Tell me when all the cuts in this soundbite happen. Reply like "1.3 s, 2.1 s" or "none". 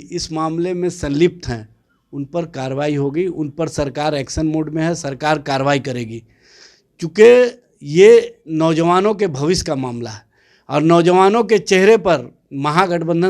none

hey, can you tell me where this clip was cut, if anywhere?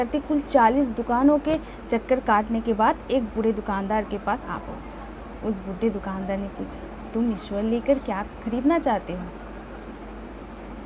none

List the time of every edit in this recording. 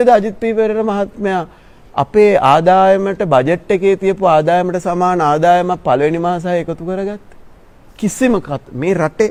none

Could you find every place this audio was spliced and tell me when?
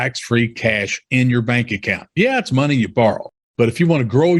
3.3 s

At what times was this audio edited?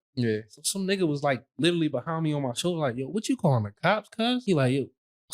4.4 s

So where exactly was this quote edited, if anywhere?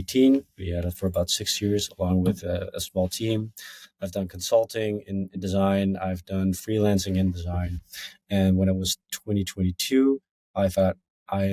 none

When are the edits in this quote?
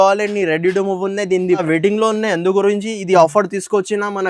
1.6 s

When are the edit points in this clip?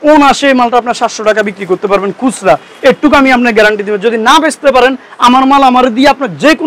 none

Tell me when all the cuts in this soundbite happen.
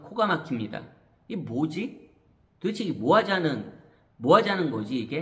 none

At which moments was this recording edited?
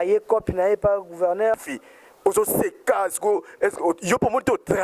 1.6 s

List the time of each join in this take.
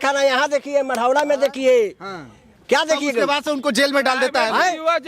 none

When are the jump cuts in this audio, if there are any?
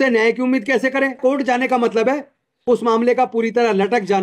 1.2 s

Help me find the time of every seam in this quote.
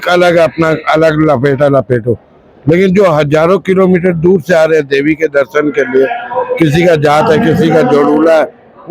none

